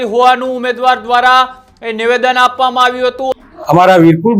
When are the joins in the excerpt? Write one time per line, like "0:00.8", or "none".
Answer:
0:03.3